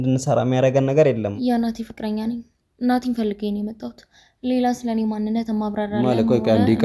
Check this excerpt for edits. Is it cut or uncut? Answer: cut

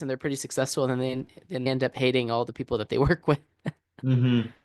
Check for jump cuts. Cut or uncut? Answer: cut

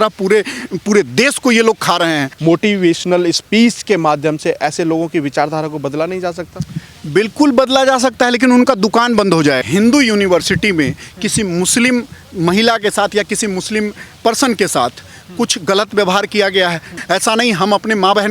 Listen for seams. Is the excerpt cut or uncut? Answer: cut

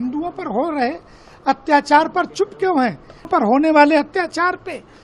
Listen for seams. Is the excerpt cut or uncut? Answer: cut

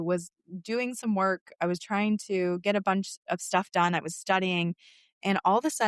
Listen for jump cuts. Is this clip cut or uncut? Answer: uncut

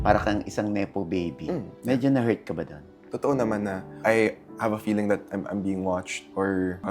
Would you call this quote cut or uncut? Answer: cut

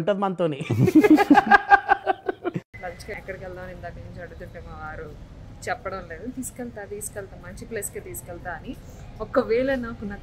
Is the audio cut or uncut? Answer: cut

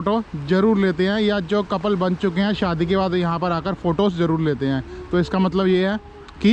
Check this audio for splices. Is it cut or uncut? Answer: uncut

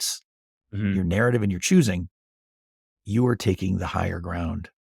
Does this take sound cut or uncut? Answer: uncut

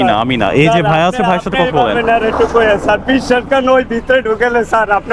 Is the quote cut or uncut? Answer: uncut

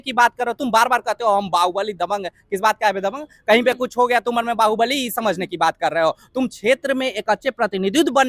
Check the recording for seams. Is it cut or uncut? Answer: uncut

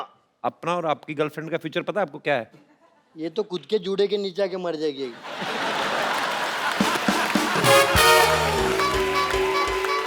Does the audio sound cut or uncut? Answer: uncut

